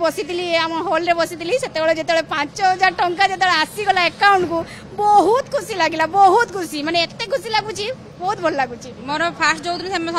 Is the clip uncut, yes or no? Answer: no